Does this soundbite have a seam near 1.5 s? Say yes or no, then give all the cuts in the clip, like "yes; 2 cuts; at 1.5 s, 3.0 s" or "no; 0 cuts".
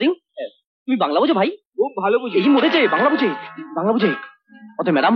no; 0 cuts